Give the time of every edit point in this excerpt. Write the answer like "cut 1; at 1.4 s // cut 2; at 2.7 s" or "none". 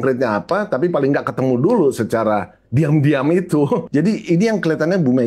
cut 1; at 3.9 s